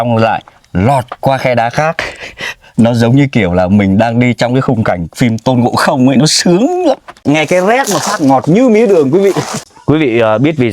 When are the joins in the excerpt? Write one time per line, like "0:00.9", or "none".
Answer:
0:07.1
0:09.5